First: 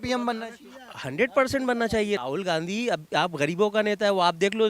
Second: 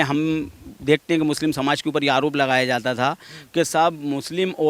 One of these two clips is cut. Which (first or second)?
first